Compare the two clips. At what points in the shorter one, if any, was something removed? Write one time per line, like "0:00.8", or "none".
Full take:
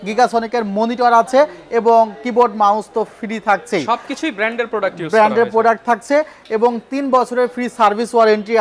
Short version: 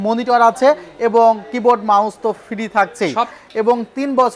0:03.4